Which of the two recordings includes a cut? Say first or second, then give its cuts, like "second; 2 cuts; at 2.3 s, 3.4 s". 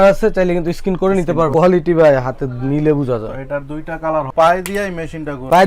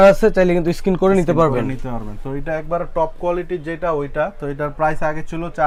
first; 2 cuts; at 1.5 s, 4.3 s